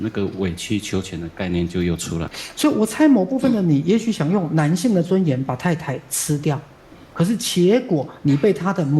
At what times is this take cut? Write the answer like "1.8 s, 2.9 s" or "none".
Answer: 2.4 s

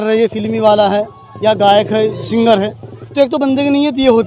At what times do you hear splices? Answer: none

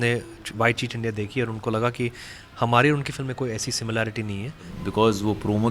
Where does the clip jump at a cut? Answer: 4.8 s

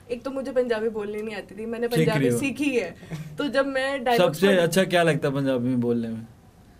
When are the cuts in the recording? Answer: none

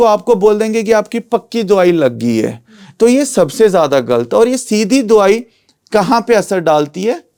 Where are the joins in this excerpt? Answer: none

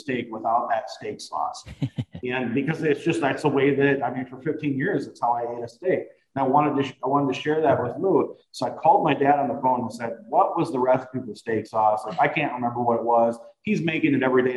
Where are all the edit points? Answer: none

